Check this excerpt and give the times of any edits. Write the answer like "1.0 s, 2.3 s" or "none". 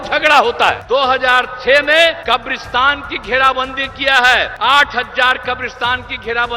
0.8 s, 2.2 s, 4.5 s